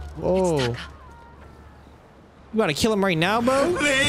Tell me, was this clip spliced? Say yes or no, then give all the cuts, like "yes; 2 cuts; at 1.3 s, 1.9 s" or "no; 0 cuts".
no; 0 cuts